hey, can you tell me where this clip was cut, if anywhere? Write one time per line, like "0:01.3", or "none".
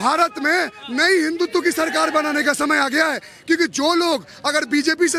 none